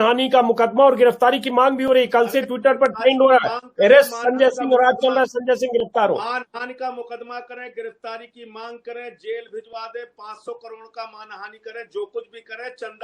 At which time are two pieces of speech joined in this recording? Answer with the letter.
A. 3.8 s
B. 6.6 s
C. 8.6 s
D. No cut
D